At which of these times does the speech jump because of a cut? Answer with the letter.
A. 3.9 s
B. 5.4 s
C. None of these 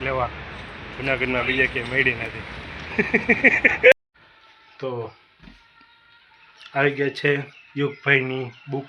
A